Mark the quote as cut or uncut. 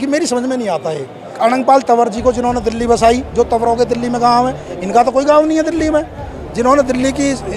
cut